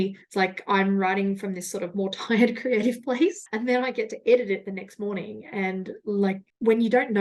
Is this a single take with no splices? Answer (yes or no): yes